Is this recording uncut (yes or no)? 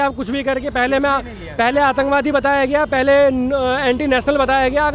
yes